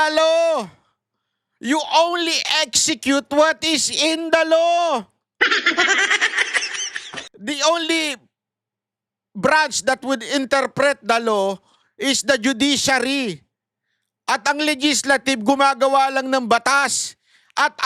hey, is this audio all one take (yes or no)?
yes